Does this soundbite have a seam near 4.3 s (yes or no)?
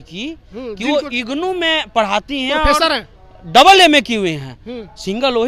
no